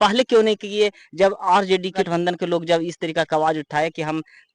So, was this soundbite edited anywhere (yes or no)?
yes